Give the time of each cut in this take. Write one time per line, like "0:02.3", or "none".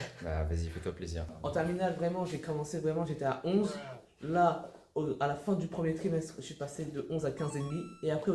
0:01.2